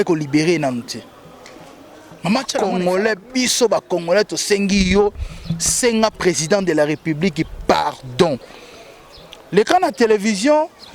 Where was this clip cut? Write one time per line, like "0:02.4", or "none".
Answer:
0:02.6